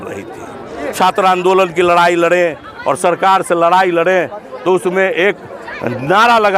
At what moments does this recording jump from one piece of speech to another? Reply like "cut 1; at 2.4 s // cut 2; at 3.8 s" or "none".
cut 1; at 0.9 s